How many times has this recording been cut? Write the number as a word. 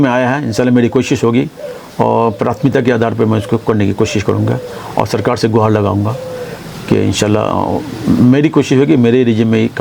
zero